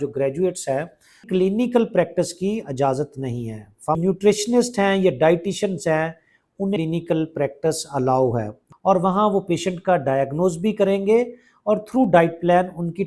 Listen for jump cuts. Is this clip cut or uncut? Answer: cut